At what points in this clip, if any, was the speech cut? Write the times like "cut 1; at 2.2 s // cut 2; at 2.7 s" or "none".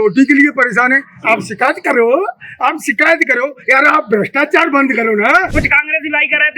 cut 1; at 5.5 s